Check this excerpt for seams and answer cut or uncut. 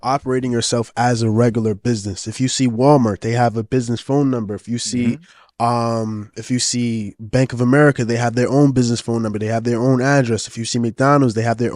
uncut